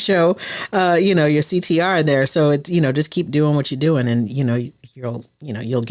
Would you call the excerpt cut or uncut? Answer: uncut